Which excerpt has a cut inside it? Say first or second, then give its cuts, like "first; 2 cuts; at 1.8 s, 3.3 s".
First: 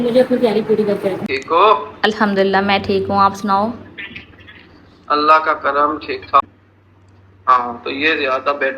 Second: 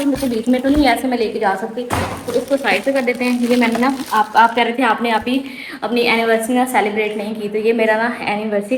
first; 2 cuts; at 1.2 s, 6.4 s